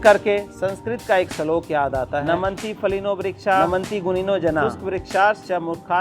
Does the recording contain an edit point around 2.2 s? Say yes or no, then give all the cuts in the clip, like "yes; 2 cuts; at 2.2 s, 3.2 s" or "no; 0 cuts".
yes; 3 cuts; at 2.2 s, 3.7 s, 4.7 s